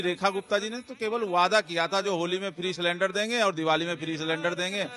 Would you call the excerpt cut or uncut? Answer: uncut